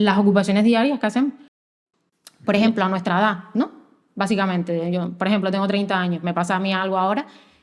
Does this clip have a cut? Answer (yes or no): yes